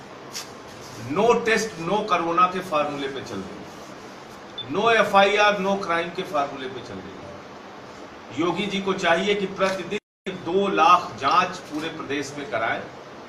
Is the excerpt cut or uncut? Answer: uncut